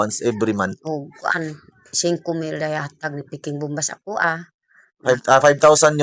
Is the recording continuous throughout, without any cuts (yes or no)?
yes